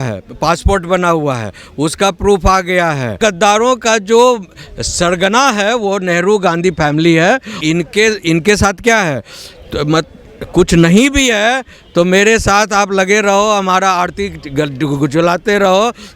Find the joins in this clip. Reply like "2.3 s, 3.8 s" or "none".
3.1 s, 7.5 s